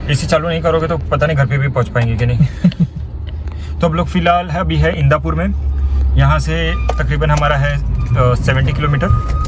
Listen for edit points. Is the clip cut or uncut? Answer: uncut